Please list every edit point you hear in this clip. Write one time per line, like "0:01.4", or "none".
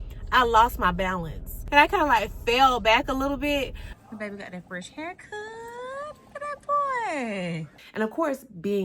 0:01.5
0:03.8
0:07.8